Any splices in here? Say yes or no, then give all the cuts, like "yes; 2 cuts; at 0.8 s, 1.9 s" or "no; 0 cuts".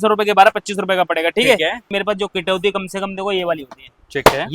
yes; 1 cut; at 1.9 s